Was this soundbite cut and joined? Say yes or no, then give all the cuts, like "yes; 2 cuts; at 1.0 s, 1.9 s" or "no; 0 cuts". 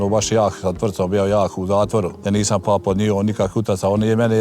yes; 1 cut; at 2.2 s